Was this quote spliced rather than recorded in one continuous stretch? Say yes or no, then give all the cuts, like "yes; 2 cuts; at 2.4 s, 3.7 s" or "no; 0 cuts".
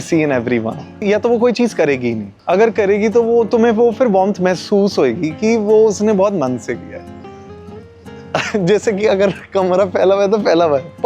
yes; 2 cuts; at 1.0 s, 2.3 s